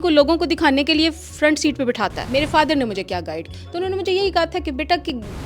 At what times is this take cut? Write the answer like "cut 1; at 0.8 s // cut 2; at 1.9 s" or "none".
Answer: cut 1; at 2.2 s // cut 2; at 3.5 s